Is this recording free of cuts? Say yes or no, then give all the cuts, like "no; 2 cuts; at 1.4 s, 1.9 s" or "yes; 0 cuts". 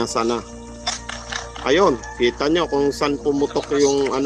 no; 1 cut; at 3.2 s